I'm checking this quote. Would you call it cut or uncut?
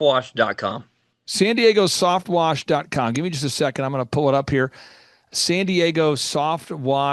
uncut